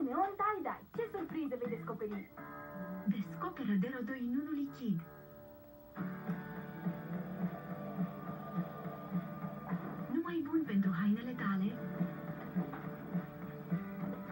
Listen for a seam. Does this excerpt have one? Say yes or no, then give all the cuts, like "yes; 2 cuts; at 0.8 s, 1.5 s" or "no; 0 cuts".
no; 0 cuts